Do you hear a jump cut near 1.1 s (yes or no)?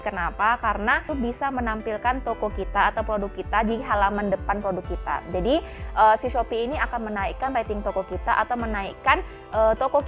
yes